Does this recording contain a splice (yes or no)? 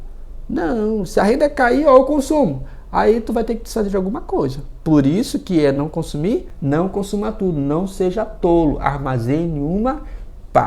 yes